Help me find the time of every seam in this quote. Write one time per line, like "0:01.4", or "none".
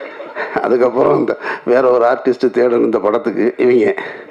none